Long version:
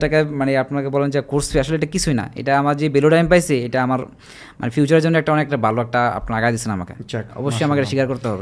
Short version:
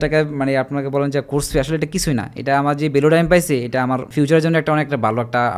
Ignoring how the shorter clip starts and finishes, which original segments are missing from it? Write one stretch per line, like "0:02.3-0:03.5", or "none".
0:04.1-0:04.7